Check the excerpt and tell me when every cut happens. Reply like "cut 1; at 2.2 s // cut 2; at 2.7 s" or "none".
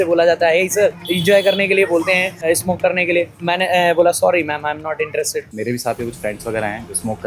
cut 1; at 1.1 s // cut 2; at 2.4 s // cut 3; at 3.3 s // cut 4; at 5.4 s

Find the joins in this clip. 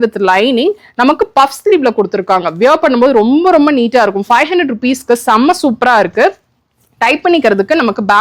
none

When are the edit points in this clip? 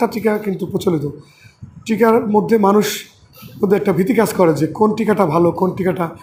none

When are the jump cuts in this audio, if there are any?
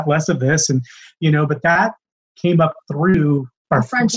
cut 1; at 1.8 s // cut 2; at 3.1 s

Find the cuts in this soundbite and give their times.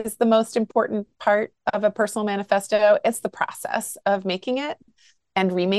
none

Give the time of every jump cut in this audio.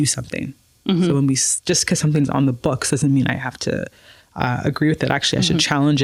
none

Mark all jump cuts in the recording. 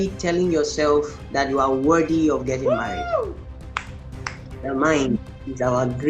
cut 1; at 1.2 s // cut 2; at 4.5 s

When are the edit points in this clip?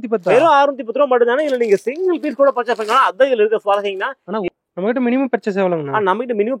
cut 1; at 4.3 s

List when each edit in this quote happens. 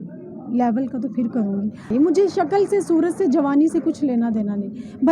cut 1; at 1.9 s

